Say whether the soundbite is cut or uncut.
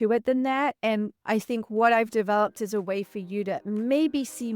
cut